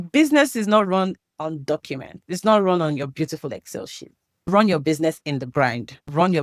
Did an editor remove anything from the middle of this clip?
yes; 3 cuts; at 2.3 s, 3.1 s, 5.3 s

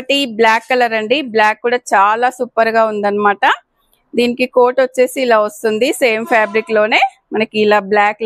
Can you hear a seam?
no; 0 cuts

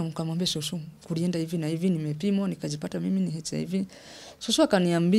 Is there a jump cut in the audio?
no; 0 cuts

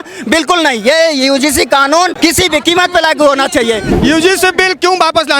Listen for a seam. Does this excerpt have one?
yes; 2 cuts; at 2.1 s, 3.9 s

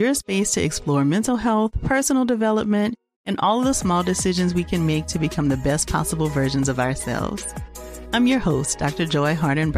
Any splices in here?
no; 0 cuts

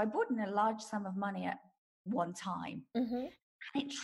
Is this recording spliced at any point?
no; 0 cuts

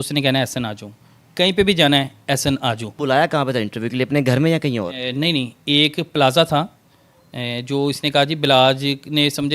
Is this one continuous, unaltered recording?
no; 1 cut; at 2.9 s

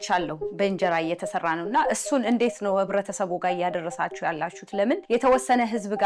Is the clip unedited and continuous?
no; 1 cut; at 5.0 s

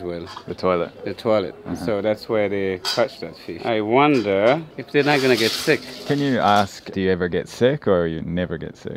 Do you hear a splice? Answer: no; 0 cuts

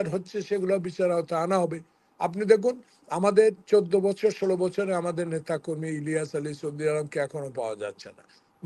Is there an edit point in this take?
no; 0 cuts

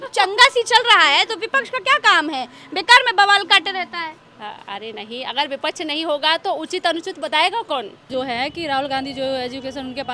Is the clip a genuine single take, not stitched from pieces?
no; 1 cut; at 8.0 s

